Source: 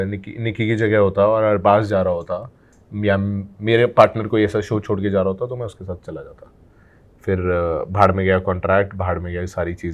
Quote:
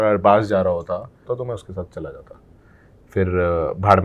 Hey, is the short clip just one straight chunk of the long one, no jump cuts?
no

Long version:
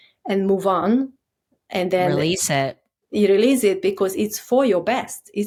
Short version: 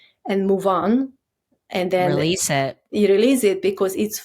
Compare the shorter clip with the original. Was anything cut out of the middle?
yes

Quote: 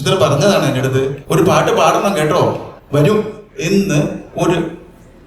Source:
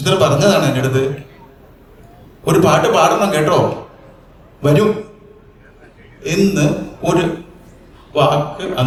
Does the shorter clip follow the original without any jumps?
no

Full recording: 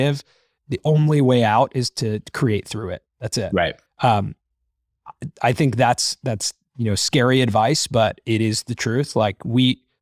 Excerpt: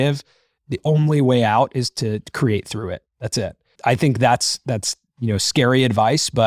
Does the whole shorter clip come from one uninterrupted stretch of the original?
no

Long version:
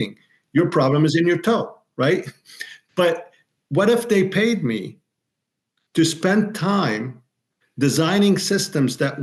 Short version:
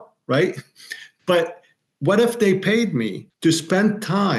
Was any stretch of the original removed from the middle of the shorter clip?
yes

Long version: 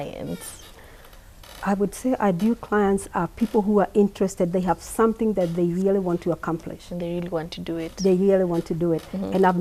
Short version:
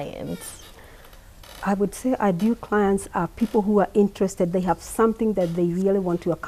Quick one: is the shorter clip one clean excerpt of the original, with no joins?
yes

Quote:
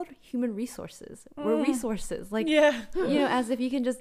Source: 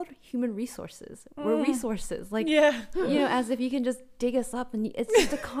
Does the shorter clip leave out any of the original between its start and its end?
no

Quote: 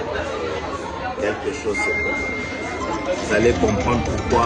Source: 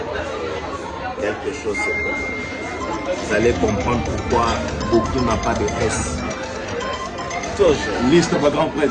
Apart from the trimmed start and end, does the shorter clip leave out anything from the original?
no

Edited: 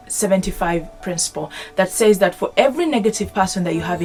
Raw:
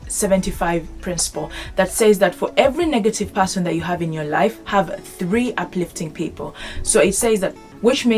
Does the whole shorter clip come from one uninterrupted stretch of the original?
yes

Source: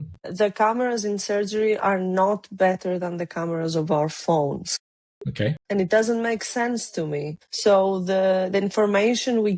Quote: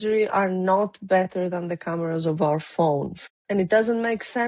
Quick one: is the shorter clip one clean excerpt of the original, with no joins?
no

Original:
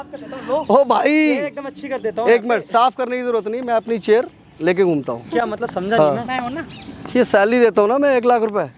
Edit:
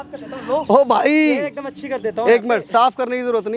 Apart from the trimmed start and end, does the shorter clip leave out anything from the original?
no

